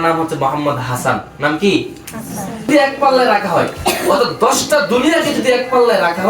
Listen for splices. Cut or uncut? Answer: cut